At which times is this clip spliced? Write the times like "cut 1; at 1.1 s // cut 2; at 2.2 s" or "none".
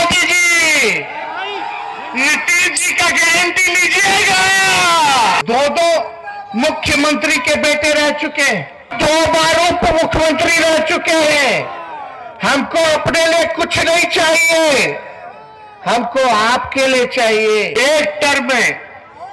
cut 1; at 5.4 s // cut 2; at 8.9 s // cut 3; at 17.7 s